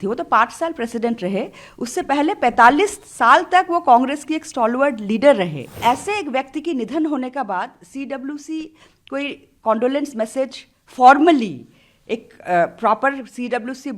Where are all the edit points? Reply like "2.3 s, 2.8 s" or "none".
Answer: 5.6 s